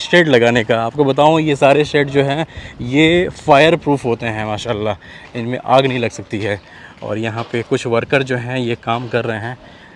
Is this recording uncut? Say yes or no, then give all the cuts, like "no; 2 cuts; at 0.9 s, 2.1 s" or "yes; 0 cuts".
yes; 0 cuts